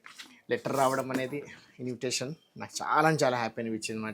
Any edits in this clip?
no; 0 cuts

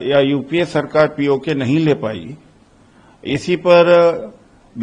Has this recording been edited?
no; 0 cuts

